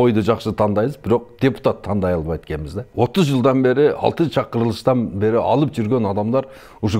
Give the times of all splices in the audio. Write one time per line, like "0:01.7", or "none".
0:02.8

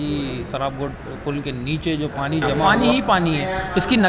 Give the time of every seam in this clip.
0:02.5

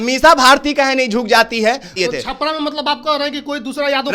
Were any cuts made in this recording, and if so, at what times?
0:02.0

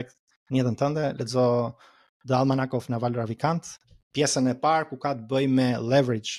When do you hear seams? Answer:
none

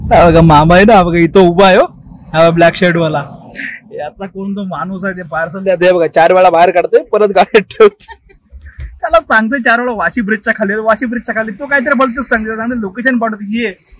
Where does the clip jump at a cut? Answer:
none

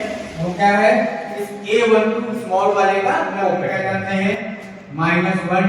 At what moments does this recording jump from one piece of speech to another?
0:03.8

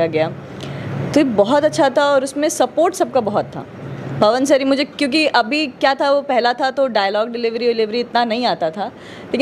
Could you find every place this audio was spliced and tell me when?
none

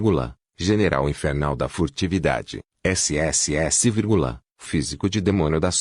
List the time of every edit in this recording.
0:01.0

